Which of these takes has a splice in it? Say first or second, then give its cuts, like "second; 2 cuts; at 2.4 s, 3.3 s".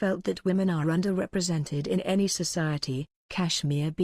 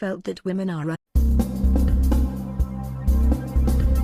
first; 1 cut; at 0.9 s